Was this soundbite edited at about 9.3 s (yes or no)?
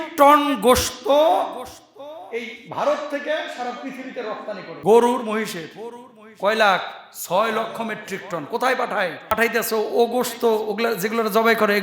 yes